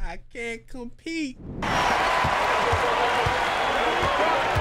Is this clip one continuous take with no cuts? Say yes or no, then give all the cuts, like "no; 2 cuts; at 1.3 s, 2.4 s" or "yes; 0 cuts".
no; 1 cut; at 1.7 s